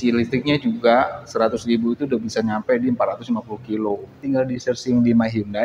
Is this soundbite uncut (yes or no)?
no